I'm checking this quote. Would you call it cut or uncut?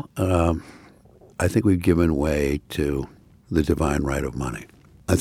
uncut